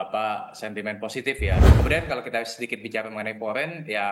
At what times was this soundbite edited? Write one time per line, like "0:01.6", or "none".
0:01.7